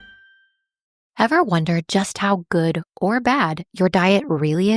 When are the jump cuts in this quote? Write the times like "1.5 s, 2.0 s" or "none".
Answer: 1.0 s